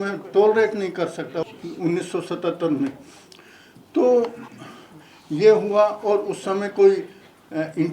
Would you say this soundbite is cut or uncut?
cut